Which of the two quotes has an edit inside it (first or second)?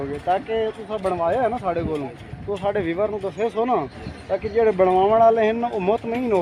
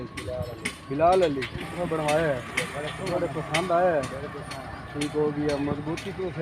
second